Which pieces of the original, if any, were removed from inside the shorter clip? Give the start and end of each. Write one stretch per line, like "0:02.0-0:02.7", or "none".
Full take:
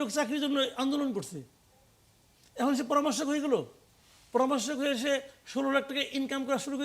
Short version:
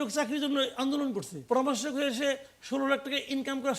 0:01.3-0:04.2